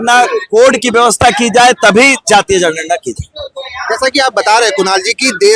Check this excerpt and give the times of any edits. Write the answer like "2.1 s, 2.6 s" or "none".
none